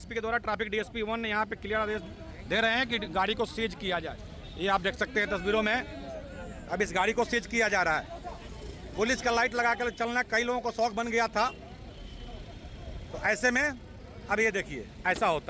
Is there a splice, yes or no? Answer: no